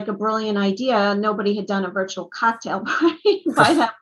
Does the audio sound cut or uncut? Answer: uncut